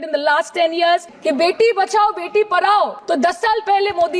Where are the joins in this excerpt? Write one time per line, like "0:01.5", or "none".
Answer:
0:01.1
0:03.0